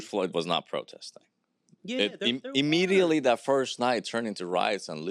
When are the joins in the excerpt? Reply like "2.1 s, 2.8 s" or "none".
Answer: none